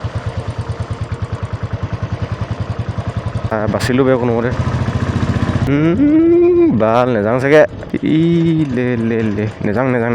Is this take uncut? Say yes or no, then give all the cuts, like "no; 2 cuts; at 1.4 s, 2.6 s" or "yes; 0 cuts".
no; 3 cuts; at 3.5 s, 5.7 s, 7.9 s